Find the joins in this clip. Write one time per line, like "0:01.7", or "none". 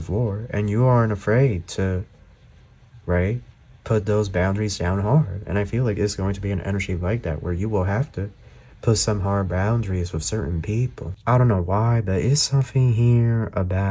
0:11.1